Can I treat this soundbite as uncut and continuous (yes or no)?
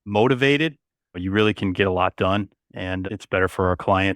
no